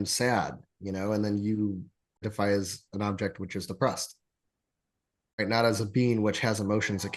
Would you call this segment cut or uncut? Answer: cut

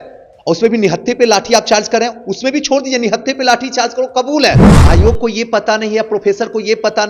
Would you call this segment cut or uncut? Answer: cut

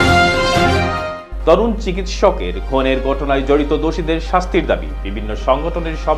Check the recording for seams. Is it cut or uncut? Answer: uncut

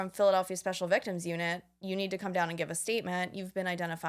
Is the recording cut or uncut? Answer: uncut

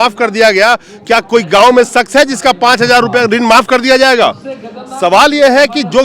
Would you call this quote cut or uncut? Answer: uncut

